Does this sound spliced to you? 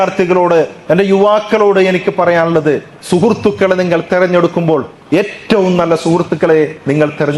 no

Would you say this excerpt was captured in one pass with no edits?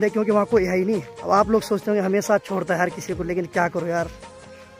no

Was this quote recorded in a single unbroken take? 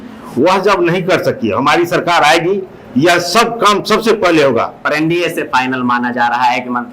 no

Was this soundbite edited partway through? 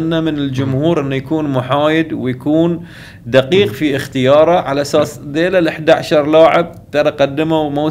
no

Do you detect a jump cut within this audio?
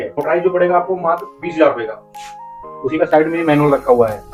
no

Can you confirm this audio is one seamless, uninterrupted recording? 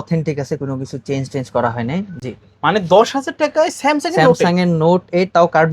no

